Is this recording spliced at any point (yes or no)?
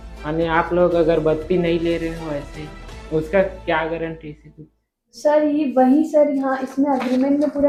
no